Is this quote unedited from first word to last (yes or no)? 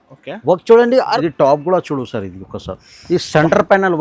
no